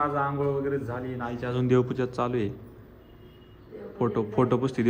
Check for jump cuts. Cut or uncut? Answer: cut